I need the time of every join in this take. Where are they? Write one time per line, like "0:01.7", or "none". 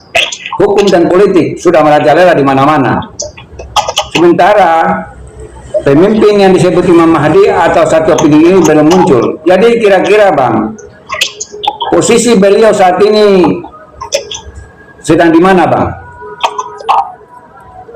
0:16.7